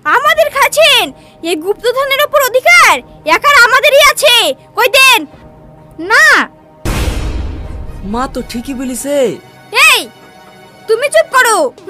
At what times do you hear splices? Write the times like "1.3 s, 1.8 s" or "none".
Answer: none